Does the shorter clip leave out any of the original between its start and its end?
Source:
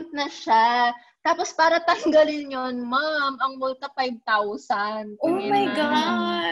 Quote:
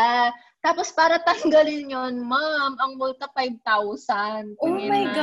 no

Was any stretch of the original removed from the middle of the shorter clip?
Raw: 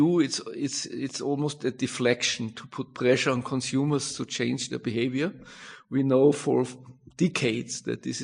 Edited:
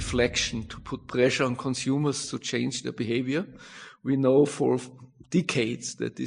no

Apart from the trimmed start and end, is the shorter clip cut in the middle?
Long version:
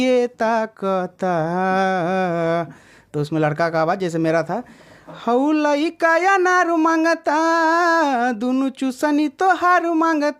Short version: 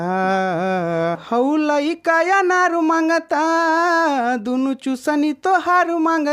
yes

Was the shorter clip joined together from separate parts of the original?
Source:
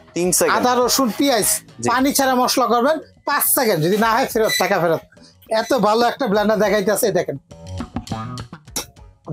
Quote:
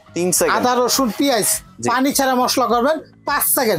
no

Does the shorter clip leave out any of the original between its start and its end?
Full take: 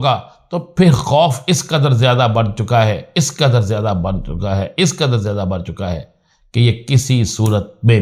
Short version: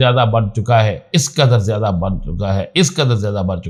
no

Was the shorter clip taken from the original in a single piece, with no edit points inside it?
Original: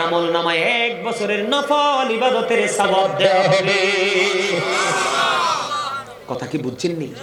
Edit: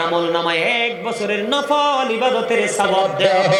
yes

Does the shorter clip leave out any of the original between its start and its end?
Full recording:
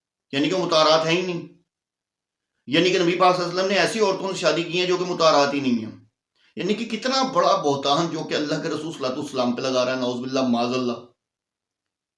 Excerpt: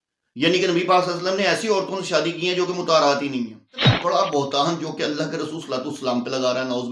yes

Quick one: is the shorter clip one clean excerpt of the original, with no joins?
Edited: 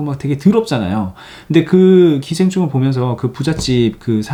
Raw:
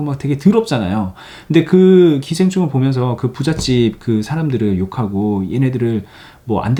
yes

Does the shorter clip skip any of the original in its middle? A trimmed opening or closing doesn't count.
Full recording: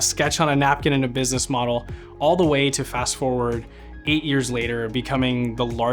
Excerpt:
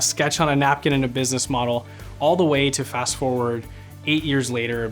no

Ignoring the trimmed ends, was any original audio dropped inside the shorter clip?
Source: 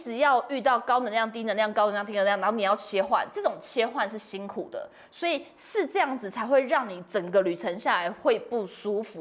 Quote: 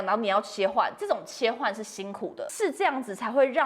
yes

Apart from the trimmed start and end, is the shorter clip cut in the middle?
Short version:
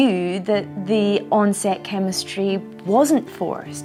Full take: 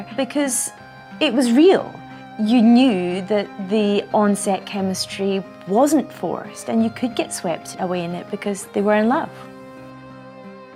no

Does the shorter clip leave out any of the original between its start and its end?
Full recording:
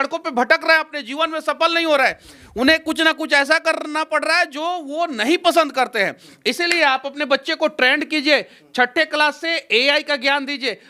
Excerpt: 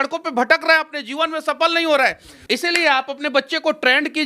yes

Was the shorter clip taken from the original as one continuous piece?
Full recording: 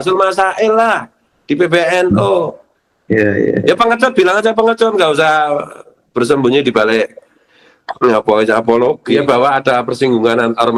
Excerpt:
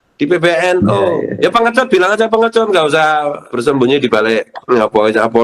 no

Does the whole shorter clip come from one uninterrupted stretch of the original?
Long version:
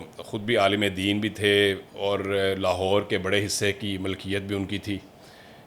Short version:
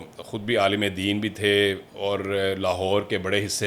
yes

